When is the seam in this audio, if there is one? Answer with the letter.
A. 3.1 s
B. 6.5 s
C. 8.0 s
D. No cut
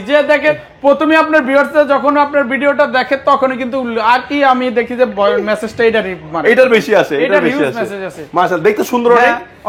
D